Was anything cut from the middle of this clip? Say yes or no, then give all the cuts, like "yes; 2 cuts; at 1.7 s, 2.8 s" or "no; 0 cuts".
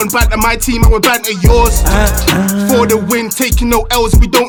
no; 0 cuts